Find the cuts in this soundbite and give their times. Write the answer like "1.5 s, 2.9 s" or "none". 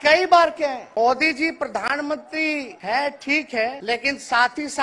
0.8 s, 2.7 s, 3.8 s